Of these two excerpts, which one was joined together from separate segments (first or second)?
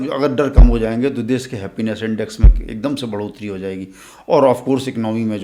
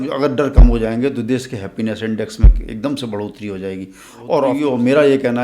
second